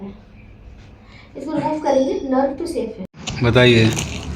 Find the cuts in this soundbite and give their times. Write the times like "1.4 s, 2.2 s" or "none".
2.1 s, 3.1 s